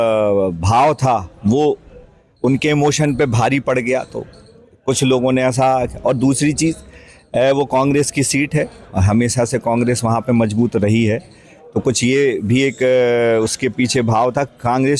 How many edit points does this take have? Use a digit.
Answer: 0